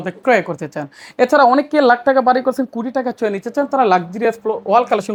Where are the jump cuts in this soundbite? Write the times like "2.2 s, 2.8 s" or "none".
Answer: none